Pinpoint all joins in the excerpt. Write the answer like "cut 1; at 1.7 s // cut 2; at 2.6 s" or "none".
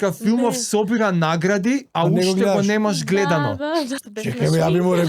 cut 1; at 4.0 s